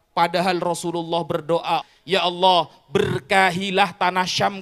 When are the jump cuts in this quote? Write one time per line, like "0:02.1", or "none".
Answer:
0:01.9